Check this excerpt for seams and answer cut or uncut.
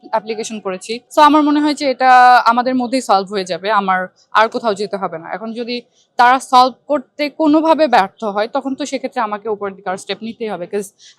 cut